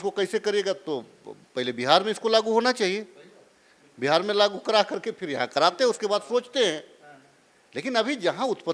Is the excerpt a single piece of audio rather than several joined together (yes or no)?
yes